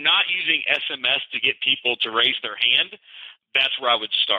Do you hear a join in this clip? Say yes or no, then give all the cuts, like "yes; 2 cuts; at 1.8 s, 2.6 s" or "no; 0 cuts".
yes; 1 cut; at 3.4 s